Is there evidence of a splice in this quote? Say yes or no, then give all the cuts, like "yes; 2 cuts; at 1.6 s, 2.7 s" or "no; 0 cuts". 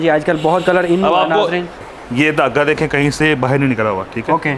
yes; 1 cut; at 1.8 s